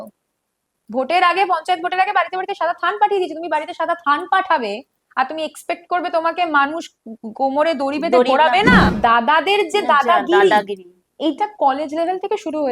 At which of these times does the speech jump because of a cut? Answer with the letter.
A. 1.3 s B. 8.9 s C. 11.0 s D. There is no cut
B